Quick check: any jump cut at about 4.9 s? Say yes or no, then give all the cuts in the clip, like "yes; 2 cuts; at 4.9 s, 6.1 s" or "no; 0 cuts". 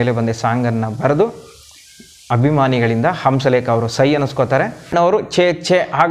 yes; 1 cut; at 4.9 s